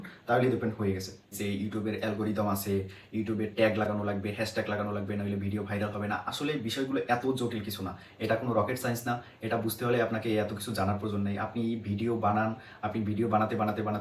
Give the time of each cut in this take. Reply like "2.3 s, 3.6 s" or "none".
1.4 s